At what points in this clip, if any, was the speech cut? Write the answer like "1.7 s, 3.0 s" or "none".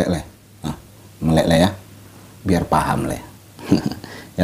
none